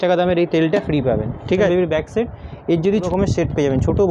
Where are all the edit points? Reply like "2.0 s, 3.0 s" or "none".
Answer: 1.7 s, 3.1 s